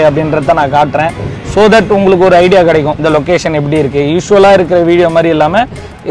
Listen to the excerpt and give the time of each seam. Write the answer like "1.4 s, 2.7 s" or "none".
3.0 s